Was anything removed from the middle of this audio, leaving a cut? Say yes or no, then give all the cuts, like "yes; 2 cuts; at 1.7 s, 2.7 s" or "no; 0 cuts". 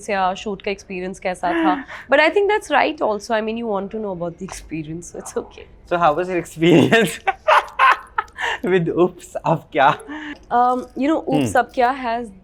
no; 0 cuts